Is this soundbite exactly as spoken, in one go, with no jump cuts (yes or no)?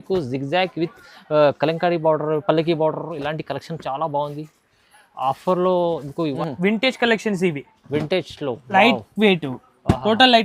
no